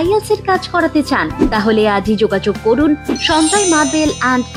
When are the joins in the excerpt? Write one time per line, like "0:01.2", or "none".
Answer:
none